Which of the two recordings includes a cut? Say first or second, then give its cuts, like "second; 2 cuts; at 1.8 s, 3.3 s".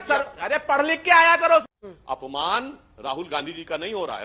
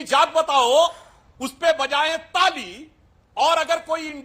first; 1 cut; at 1.7 s